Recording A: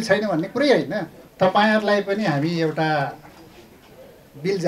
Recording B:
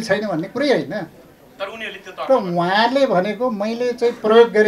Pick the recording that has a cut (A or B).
A